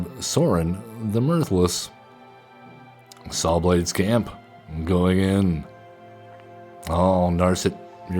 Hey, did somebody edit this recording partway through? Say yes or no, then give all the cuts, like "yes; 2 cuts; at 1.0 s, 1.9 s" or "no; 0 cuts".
yes; 1 cut; at 3.0 s